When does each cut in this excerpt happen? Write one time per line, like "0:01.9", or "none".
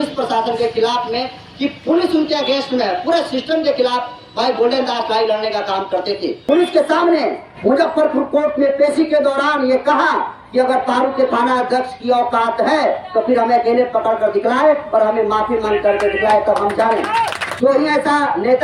0:06.4
0:17.4